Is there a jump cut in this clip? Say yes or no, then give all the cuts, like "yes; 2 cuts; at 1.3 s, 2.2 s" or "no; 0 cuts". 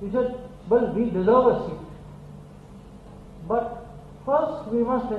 no; 0 cuts